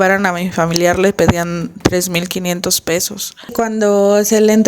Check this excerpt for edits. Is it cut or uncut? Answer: cut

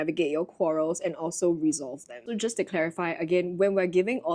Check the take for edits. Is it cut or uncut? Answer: uncut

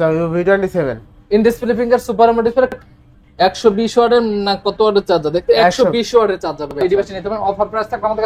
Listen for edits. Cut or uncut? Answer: cut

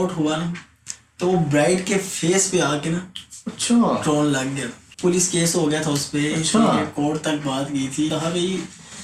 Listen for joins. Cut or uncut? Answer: cut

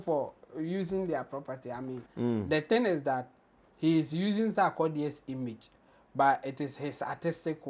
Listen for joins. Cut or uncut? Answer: cut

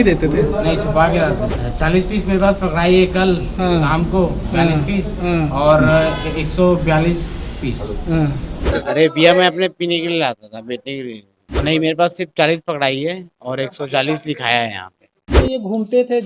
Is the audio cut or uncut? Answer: cut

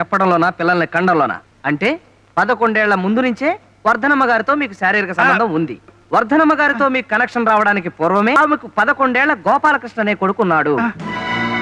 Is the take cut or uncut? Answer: cut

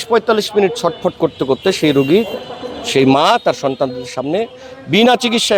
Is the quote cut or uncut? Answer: uncut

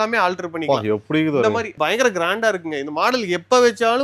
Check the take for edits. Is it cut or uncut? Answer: uncut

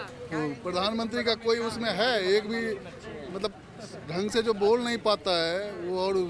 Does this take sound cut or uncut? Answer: uncut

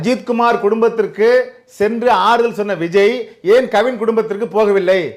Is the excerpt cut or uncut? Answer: uncut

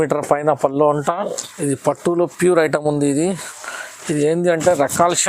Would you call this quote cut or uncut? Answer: cut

